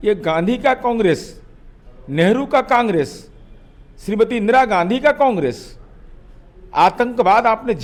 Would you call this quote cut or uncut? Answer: uncut